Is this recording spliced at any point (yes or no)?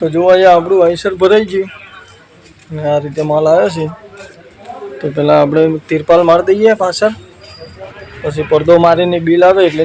no